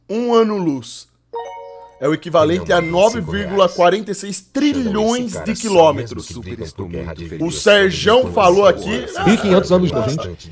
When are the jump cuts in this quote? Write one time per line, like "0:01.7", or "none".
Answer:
none